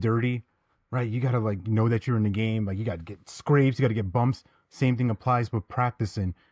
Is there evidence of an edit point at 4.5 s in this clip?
no; 0 cuts

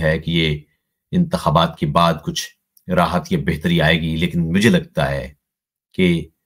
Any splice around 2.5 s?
no; 0 cuts

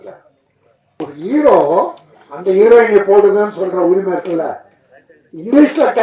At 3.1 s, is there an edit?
no; 1 cut; at 1.0 s

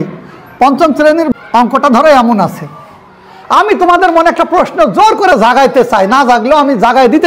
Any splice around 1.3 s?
yes; 1 cut; at 1.3 s

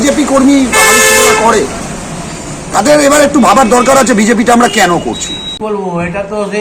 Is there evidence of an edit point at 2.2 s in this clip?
no; 1 cut; at 5.6 s

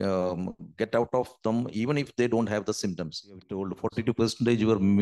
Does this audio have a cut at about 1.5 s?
no; 1 cut; at 3.6 s

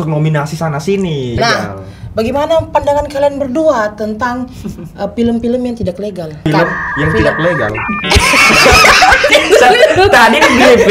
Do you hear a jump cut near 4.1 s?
no; 3 cuts; at 1.3 s, 6.4 s, 9.3 s

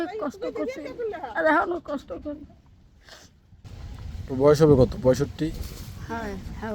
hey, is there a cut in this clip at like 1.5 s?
no; 1 cut; at 3.7 s

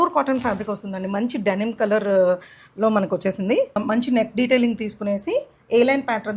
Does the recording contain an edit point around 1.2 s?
no; 1 cut; at 3.8 s

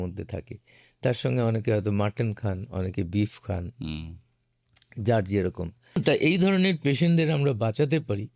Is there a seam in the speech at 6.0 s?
yes; 1 cut; at 6.0 s

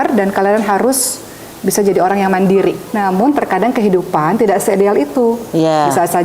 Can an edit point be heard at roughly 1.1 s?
no; 1 cut; at 2.9 s

